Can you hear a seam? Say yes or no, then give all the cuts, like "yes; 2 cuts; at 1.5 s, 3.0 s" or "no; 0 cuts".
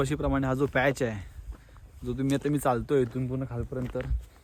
no; 0 cuts